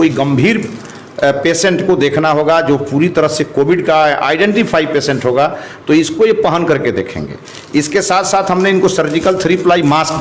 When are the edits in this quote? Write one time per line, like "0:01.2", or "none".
none

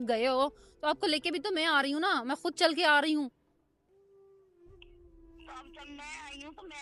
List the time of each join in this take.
none

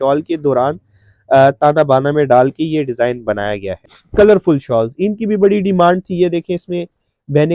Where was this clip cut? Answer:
0:04.0

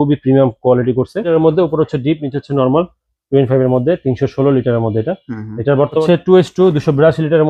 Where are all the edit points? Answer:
0:01.2
0:06.0

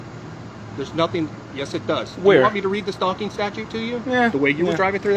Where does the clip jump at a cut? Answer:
0:04.0

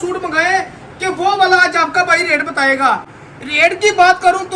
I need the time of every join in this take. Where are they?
none

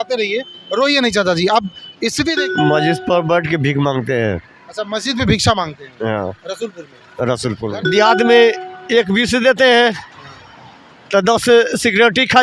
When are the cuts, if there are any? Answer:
0:02.4
0:07.8

